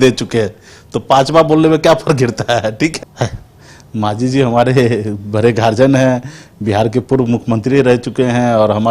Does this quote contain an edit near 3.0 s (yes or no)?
yes